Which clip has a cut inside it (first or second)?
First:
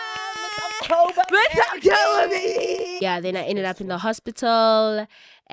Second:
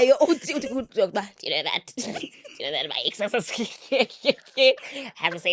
first